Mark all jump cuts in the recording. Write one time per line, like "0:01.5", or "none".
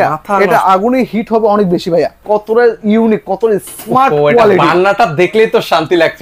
0:02.2